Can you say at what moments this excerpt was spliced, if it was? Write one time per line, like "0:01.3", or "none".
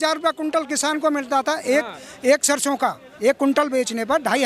none